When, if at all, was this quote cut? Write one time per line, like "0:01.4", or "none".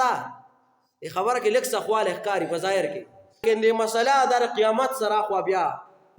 0:03.4